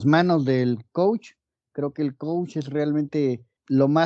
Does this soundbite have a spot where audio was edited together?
no; 0 cuts

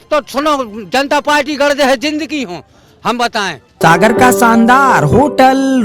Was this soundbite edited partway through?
yes; 1 cut; at 3.6 s

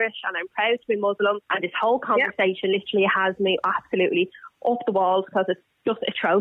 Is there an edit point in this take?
yes; 1 cut; at 1.5 s

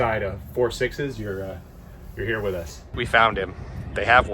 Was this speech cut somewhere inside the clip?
yes; 1 cut; at 2.9 s

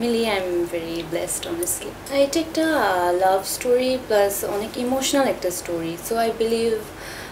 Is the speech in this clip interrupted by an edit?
no; 0 cuts

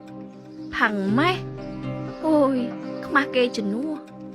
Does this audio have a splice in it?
no; 0 cuts

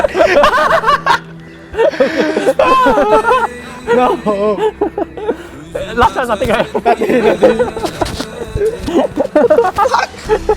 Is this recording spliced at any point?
no; 0 cuts

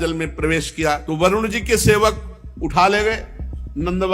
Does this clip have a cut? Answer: yes; 1 cut; at 1.0 s

